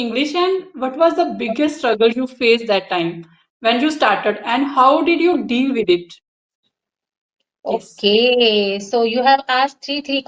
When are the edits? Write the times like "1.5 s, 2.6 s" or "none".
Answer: none